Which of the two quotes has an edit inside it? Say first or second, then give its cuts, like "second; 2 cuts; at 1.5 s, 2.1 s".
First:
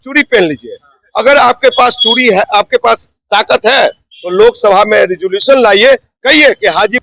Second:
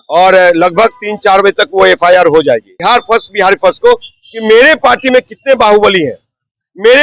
second; 1 cut; at 2.7 s